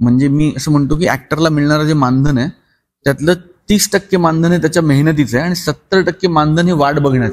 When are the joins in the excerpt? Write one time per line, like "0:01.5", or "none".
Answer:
none